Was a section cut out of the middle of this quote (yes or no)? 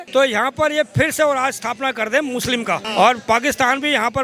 yes